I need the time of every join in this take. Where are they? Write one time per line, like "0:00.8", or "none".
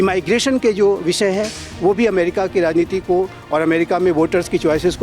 none